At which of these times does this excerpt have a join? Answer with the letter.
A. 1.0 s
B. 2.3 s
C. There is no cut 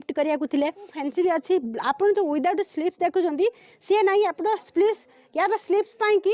A